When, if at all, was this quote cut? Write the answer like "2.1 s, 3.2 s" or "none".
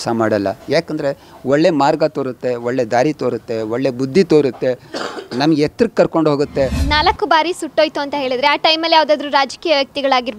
6.8 s